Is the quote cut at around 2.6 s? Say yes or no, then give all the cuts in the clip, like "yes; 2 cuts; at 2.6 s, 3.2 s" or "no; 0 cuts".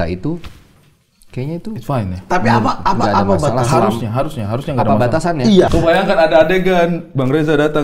no; 1 cut; at 5.7 s